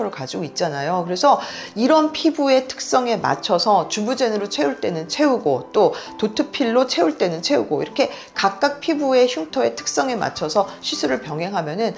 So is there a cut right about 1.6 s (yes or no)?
no